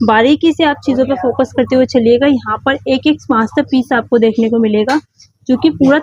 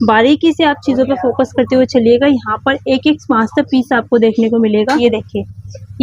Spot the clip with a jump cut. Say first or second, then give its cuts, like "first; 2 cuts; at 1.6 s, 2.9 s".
second; 1 cut; at 5.0 s